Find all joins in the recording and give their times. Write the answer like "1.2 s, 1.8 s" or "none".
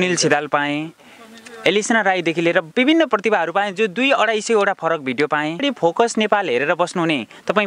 5.6 s